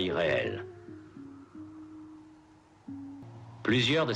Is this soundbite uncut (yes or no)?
no